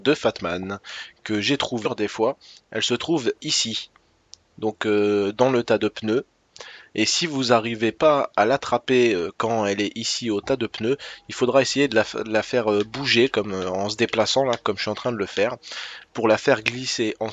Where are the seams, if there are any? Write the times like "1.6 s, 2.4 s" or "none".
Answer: none